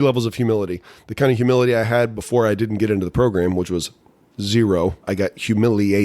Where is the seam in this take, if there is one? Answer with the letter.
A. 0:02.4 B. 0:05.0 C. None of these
B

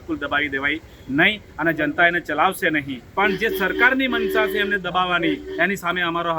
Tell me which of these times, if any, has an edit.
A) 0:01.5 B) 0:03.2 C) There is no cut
B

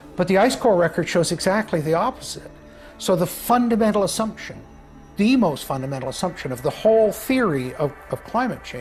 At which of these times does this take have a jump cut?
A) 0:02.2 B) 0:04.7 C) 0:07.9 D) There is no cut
D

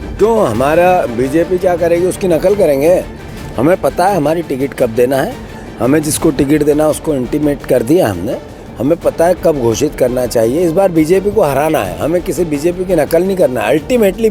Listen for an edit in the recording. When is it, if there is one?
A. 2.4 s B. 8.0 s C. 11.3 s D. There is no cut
D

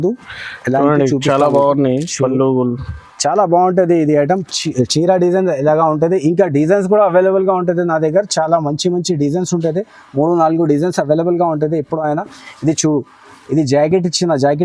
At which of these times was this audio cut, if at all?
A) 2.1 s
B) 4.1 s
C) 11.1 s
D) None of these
D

